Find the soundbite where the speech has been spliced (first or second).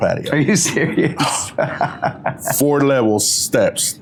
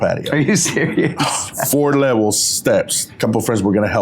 second